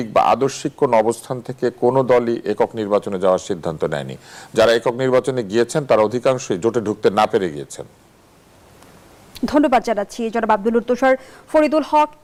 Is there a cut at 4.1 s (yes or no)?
no